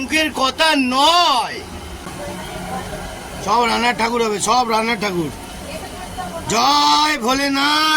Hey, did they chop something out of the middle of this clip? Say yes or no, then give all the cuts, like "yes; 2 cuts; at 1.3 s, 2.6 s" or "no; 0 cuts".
yes; 1 cut; at 2.0 s